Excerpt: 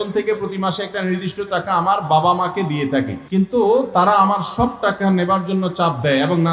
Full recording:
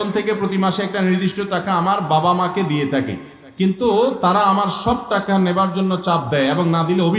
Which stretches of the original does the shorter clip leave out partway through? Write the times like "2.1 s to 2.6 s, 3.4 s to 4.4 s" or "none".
3.2 s to 3.5 s